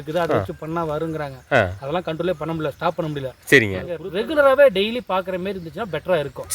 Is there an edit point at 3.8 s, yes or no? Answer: yes